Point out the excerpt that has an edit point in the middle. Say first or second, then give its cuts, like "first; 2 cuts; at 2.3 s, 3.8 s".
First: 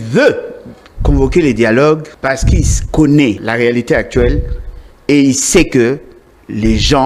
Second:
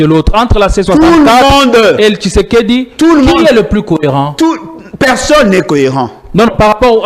first; 2 cuts; at 2.1 s, 3.4 s